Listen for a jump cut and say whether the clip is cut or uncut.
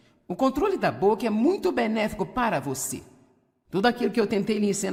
uncut